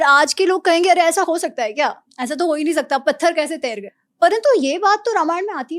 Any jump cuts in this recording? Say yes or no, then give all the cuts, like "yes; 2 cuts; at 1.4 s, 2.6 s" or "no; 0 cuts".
yes; 1 cut; at 3.9 s